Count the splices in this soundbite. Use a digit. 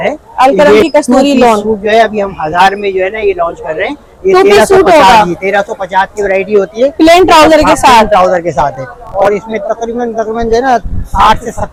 0